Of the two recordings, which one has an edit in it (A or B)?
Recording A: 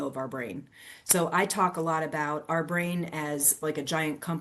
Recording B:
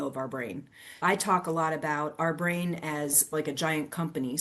B